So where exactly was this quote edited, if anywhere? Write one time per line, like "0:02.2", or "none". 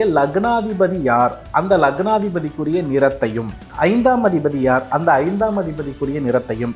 none